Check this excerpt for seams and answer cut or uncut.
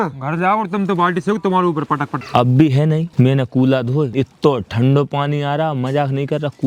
cut